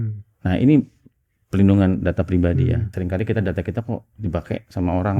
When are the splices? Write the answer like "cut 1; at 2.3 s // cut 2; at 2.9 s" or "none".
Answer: cut 1; at 2.9 s